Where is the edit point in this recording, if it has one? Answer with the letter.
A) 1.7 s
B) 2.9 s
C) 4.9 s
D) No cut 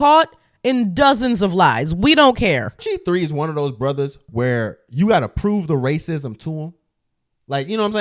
B